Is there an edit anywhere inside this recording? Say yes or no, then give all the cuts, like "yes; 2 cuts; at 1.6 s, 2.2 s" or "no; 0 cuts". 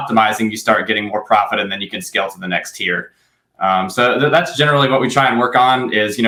no; 0 cuts